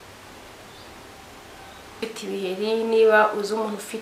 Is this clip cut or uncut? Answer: cut